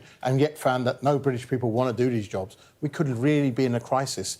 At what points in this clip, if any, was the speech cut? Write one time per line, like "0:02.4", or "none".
none